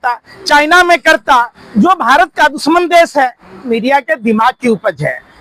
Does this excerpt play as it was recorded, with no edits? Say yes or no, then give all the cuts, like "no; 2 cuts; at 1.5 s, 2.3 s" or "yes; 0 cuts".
no; 1 cut; at 3.6 s